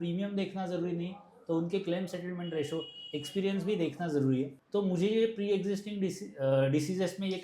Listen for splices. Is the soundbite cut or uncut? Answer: cut